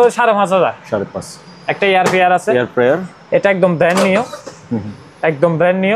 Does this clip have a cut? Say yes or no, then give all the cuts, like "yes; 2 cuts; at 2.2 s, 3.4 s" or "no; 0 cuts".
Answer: no; 0 cuts